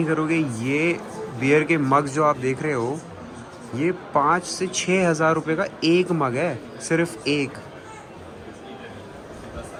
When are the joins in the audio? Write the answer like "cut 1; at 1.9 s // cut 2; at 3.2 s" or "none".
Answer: none